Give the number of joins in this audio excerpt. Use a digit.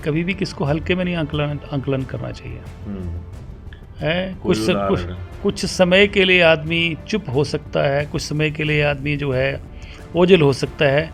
0